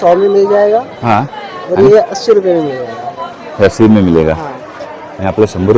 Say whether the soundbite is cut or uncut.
uncut